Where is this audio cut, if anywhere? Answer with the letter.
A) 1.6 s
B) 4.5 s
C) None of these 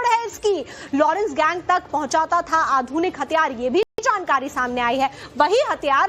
C